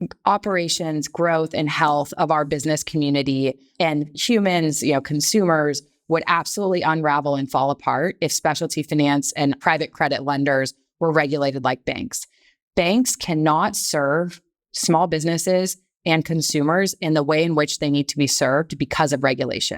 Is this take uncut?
no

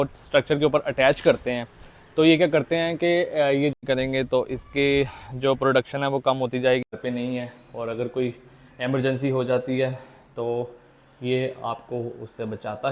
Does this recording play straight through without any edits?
no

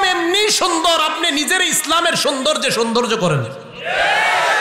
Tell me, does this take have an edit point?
no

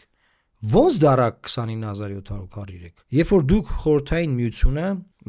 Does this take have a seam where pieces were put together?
no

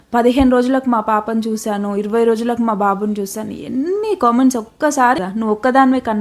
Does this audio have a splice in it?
yes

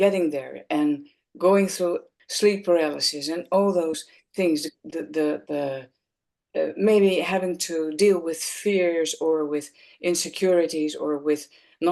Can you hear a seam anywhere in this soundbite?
yes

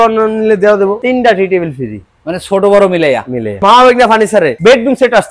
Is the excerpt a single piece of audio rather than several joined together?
no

